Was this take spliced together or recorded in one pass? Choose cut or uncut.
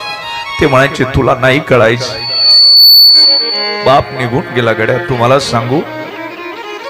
uncut